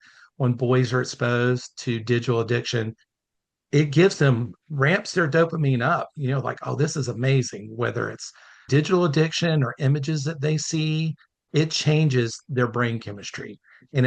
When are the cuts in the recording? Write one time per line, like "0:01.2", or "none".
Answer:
0:08.5
0:11.4